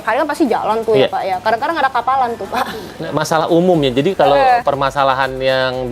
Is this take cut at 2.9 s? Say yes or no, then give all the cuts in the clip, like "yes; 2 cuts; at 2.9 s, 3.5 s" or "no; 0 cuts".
yes; 1 cut; at 2.9 s